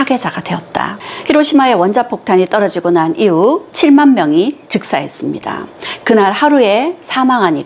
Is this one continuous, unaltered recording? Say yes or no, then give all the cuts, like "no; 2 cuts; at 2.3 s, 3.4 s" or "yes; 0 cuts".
no; 1 cut; at 1.1 s